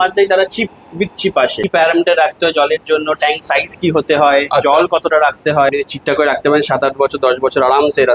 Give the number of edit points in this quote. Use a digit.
2